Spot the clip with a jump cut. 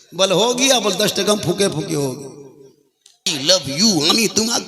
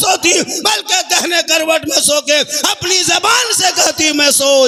first; 1 cut; at 3.3 s

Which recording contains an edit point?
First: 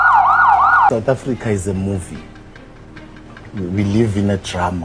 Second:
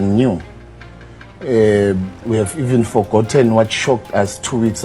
first; 1 cut; at 0.9 s

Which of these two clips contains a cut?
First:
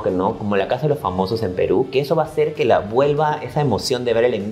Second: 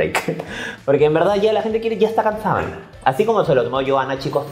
second; 1 cut; at 2.8 s

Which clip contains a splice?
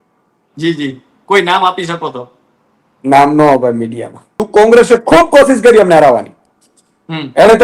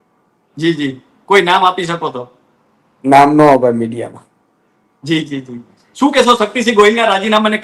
first; 1 cut; at 4.4 s

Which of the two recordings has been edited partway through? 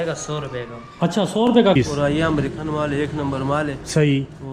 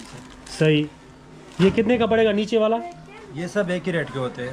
first; 1 cut; at 1.8 s

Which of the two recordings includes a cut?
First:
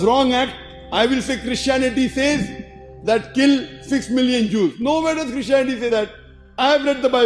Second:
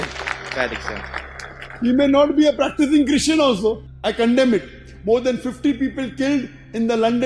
second; 1 cut; at 3.9 s

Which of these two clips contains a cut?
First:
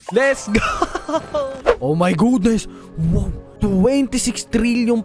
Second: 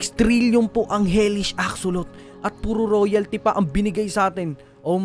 first; 2 cuts; at 1.6 s, 3.4 s

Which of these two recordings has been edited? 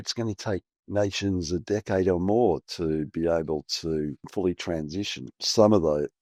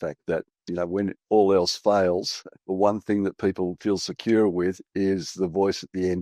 second; 1 cut; at 3.8 s

